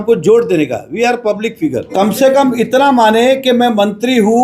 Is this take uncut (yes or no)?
no